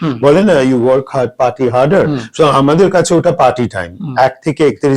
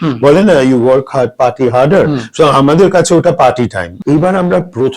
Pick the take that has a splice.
second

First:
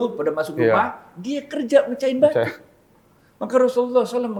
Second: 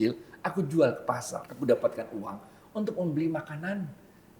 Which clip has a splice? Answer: second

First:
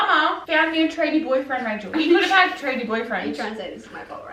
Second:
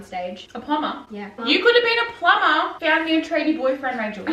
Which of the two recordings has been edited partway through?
second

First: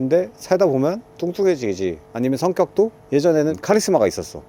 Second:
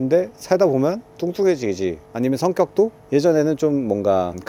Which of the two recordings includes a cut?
first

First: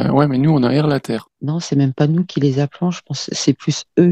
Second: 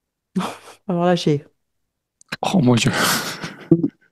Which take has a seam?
first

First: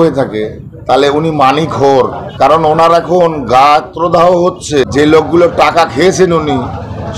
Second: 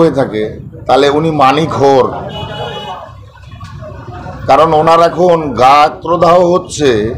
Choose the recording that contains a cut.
first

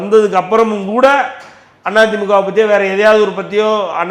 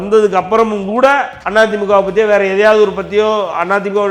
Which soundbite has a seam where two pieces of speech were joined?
second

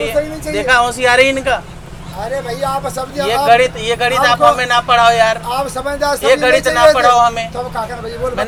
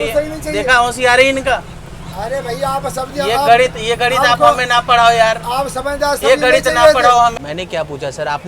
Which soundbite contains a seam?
second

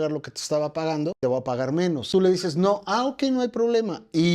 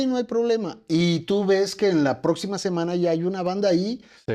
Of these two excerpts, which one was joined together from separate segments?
first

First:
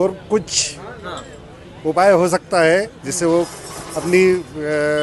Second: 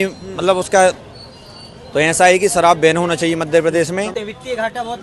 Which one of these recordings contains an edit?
second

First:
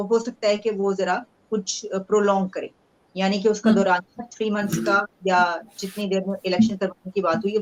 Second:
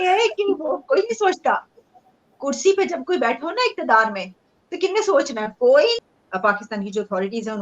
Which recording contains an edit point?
second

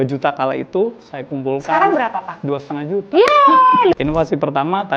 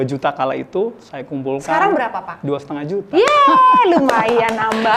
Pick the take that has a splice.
first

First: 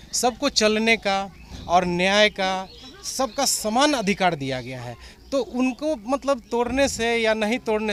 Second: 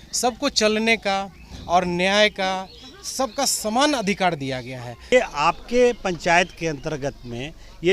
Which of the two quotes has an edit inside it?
second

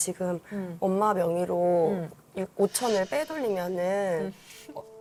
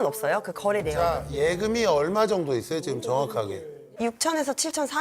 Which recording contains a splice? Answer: second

